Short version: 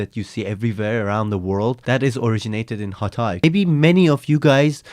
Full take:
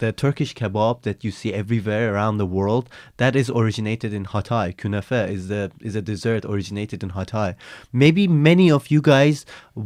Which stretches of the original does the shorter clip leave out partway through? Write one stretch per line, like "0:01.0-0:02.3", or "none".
0:02.9-0:03.1
0:04.8-0:08.1